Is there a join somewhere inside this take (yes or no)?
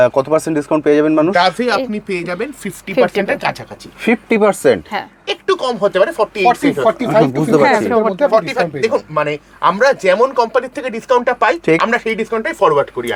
no